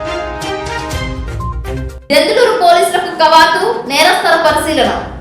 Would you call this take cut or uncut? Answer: uncut